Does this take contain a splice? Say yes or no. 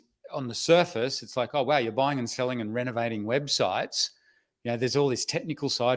no